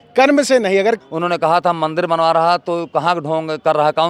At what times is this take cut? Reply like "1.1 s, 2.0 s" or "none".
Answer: 1.0 s